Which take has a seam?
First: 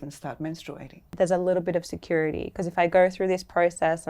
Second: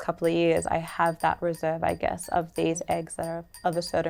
first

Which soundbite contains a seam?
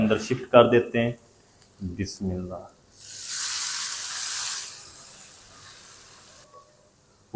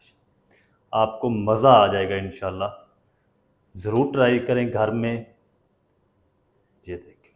first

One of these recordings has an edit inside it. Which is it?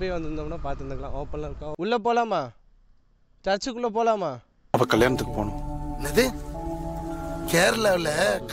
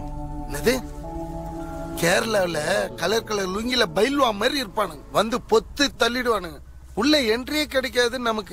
first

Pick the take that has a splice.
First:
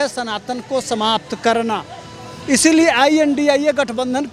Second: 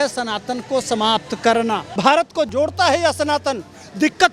second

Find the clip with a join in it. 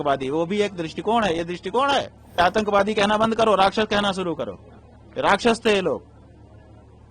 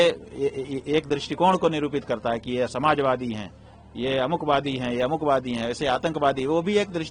first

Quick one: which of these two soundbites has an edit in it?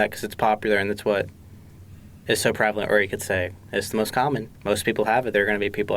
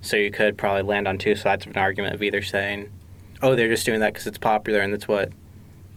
first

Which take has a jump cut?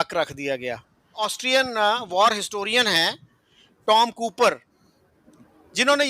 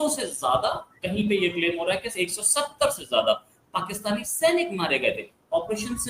first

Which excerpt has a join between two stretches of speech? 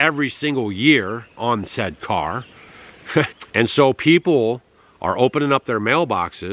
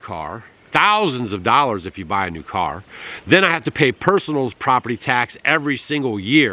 first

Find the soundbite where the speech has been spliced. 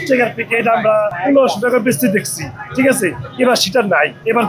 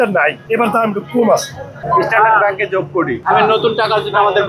second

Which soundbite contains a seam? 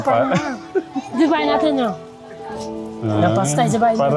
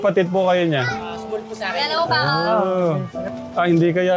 second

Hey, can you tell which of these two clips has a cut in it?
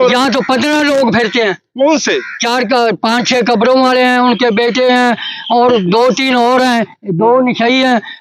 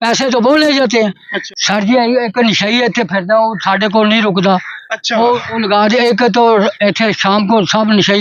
second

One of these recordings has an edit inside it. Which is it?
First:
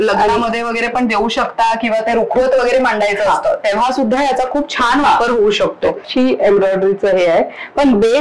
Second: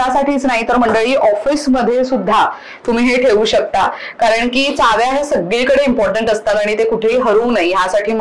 first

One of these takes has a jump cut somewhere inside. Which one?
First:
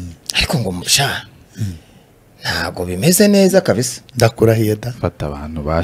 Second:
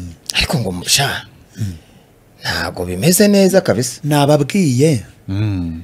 second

